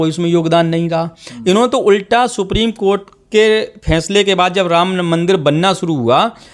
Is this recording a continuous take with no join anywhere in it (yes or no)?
yes